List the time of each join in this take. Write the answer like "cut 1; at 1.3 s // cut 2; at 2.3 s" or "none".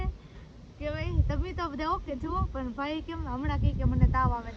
none

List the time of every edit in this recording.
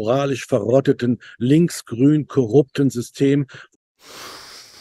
none

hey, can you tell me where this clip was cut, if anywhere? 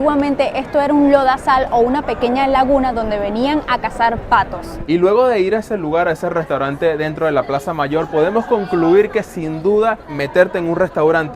cut 1; at 4.7 s // cut 2; at 10.1 s

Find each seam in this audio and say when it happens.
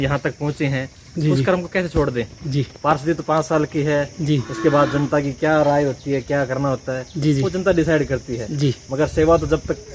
none

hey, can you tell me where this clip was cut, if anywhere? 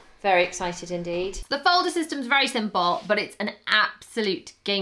cut 1; at 1.4 s

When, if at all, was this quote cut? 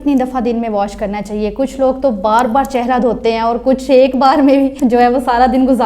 cut 1; at 4.7 s

